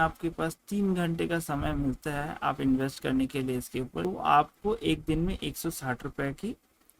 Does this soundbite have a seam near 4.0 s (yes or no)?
yes